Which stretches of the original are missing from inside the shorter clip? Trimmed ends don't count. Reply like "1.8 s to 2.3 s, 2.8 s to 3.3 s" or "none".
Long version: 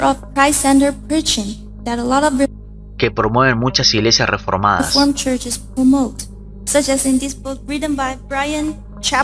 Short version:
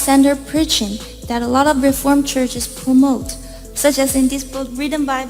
2.5 s to 4.9 s